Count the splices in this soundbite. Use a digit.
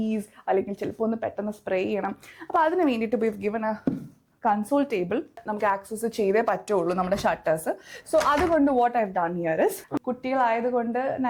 2